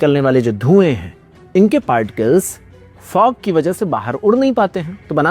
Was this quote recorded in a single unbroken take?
yes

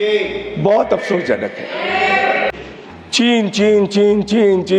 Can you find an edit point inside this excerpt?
yes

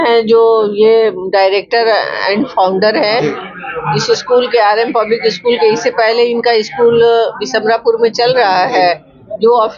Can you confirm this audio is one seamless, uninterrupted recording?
yes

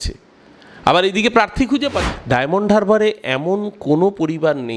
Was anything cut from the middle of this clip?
yes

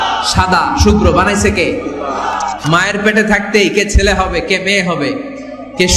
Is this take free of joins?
no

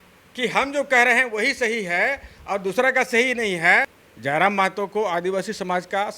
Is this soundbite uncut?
no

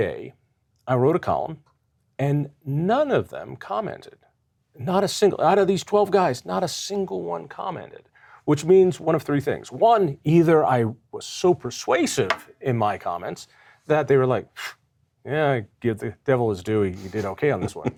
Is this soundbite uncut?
yes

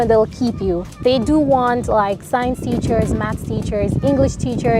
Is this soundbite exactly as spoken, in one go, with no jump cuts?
yes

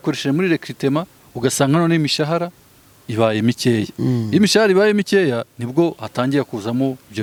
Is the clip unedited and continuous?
yes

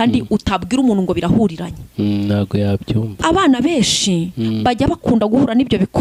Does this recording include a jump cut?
no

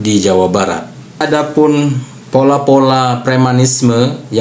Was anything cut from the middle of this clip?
yes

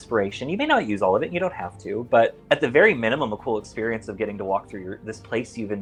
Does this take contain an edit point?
no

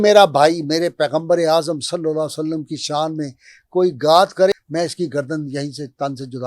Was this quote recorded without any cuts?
no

